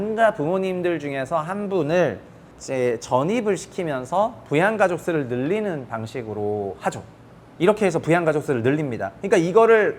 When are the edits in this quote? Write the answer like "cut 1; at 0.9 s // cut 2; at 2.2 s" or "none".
none